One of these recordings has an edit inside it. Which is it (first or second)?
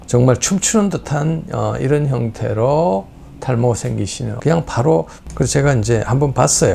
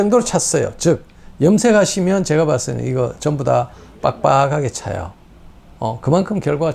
first